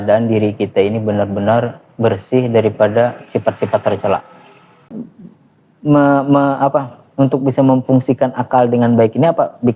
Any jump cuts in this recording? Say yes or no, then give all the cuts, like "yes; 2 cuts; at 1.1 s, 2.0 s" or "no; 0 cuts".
yes; 1 cut; at 4.8 s